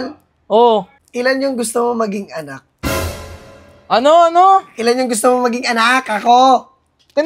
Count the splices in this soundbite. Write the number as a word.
one